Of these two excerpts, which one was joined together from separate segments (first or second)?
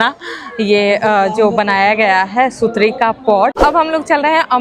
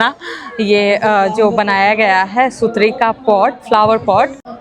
first